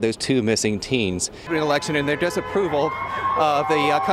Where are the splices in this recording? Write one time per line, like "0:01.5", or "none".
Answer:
0:01.5